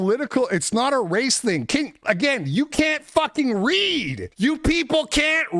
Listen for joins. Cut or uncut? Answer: uncut